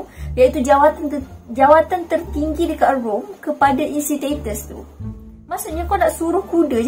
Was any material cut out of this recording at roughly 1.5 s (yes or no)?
no